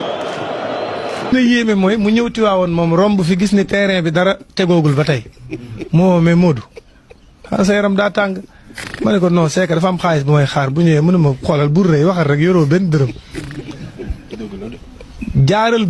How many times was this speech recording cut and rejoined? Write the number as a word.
one